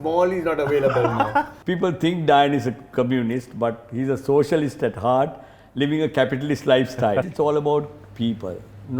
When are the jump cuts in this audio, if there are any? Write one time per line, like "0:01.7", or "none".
0:01.6
0:07.3